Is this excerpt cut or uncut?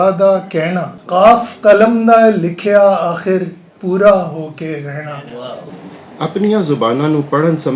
cut